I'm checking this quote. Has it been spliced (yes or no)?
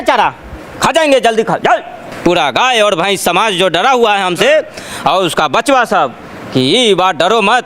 yes